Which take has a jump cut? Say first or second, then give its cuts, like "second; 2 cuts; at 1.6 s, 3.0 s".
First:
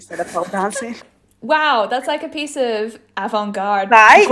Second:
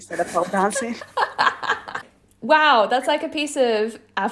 first; 1 cut; at 1.0 s